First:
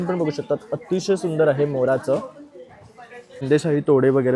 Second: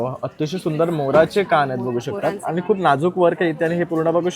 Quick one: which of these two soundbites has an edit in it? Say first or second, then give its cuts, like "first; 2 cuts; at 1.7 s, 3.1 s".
first; 1 cut; at 3.4 s